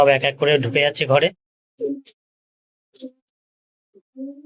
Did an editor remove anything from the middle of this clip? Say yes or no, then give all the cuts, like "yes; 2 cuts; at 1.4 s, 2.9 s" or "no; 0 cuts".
no; 0 cuts